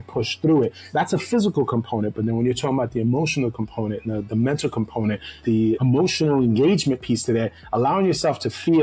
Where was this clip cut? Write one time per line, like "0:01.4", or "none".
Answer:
0:05.6